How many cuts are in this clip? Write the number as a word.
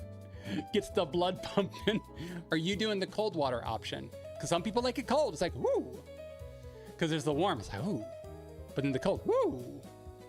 zero